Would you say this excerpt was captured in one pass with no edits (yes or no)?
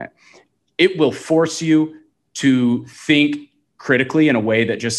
yes